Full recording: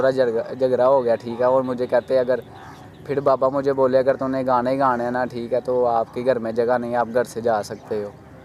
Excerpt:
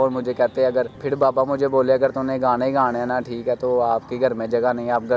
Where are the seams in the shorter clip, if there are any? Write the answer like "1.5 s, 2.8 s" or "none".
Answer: 1.0 s